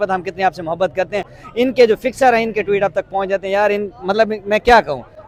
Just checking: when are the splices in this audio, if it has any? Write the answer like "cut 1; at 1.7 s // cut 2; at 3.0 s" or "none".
none

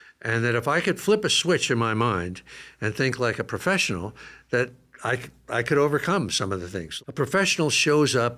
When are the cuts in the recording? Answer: cut 1; at 6.8 s

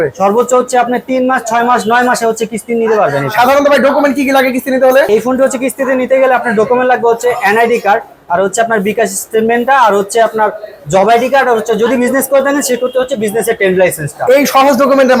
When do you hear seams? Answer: none

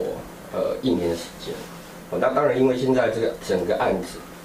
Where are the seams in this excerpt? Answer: none

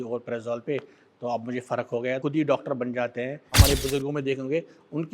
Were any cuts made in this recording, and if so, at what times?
cut 1; at 2.2 s // cut 2; at 3.6 s

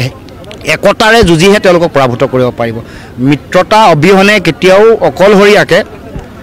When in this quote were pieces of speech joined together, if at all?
none

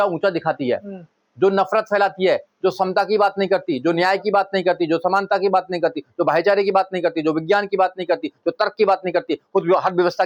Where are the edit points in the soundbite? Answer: none

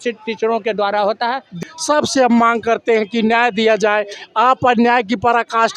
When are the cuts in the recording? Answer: cut 1; at 1.6 s

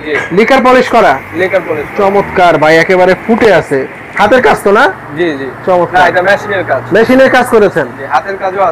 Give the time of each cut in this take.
none

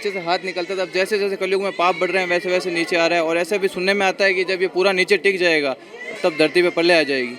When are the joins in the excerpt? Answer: none

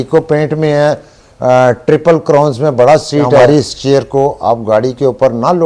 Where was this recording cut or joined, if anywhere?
cut 1; at 3.4 s

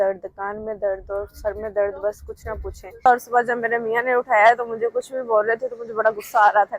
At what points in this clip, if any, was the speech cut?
cut 1; at 3.1 s

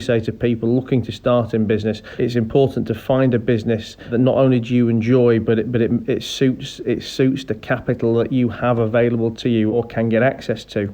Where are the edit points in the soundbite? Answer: cut 1; at 2.1 s // cut 2; at 4.1 s // cut 3; at 9.7 s

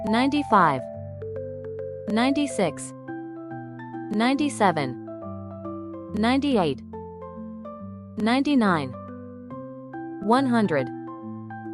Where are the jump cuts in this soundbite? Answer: cut 1; at 10.8 s

